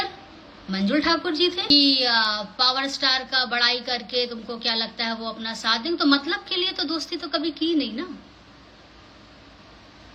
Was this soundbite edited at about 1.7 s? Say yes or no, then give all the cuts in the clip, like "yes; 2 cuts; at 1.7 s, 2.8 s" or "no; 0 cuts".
yes; 1 cut; at 1.7 s